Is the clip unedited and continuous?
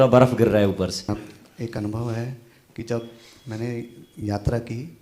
no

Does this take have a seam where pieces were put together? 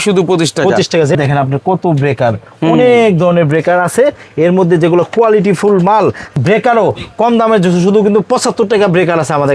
yes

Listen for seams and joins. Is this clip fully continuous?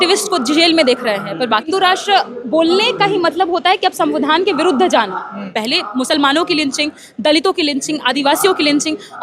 no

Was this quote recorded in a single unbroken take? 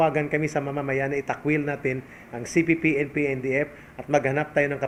yes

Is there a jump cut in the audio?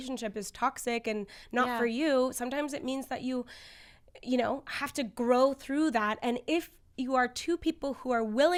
no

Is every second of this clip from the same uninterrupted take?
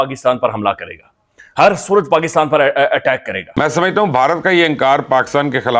no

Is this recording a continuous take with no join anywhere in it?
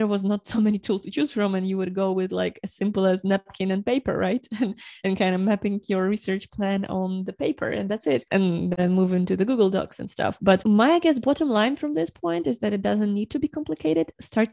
yes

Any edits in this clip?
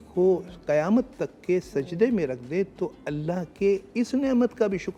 no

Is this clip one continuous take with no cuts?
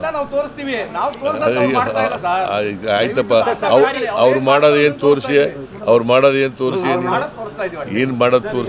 yes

